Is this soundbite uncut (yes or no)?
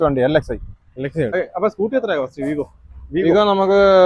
no